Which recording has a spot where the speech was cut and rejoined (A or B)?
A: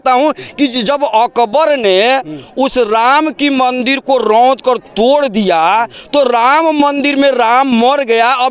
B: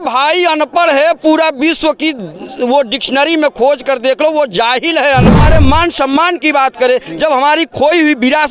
B